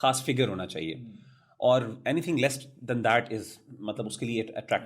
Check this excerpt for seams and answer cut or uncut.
uncut